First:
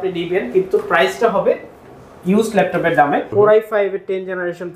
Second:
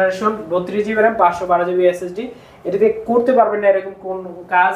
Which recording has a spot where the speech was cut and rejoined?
first; 1 cut; at 3.3 s

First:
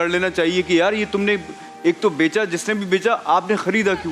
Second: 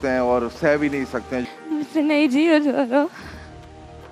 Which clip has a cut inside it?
second; 1 cut; at 1.4 s

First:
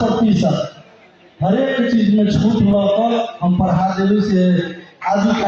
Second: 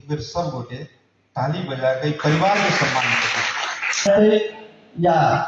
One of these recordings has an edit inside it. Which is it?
second; 1 cut; at 4.1 s

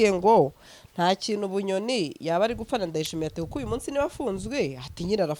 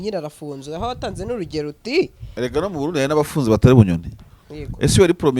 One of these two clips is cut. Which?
second; 1 cut; at 2.2 s

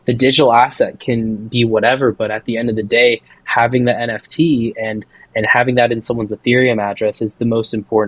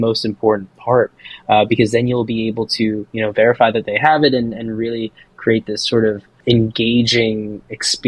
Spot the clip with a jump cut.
second; 1 cut; at 6.3 s

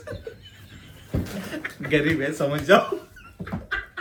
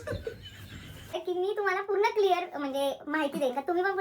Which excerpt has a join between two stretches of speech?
second; 1 cut; at 1.1 s

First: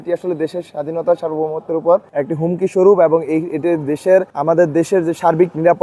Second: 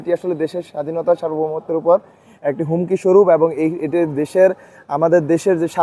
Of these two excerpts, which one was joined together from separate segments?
first; 2 cuts; at 2.1 s, 4.3 s

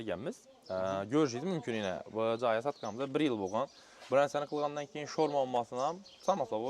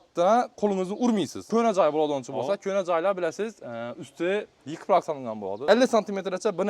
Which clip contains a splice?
second; 2 cuts; at 1.4 s, 5.6 s

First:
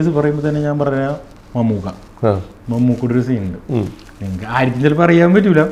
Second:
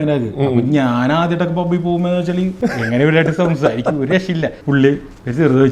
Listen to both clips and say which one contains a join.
second; 2 cuts; at 2.6 s, 4.6 s

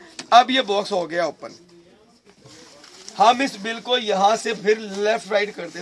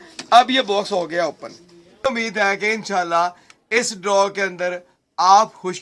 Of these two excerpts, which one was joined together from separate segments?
second; 1 cut; at 2.1 s

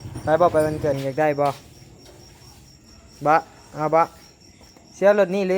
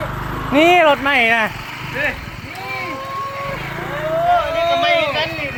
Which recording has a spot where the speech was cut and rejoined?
first; 1 cut; at 1.0 s

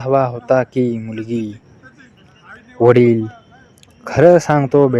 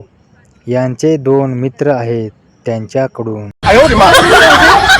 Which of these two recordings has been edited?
second; 1 cut; at 3.4 s

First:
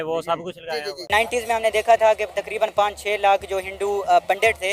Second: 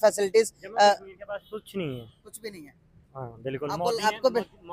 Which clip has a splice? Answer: first; 1 cut; at 1.1 s

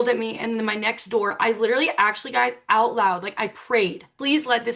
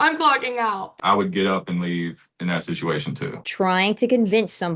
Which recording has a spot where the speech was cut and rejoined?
second; 3 cuts; at 0.9 s, 2.3 s, 3.4 s

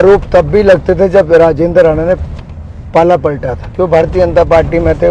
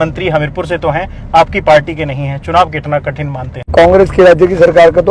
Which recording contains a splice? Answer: second; 1 cut; at 3.7 s

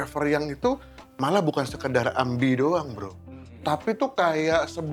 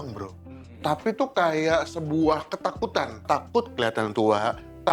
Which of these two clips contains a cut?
second; 1 cut; at 3.2 s

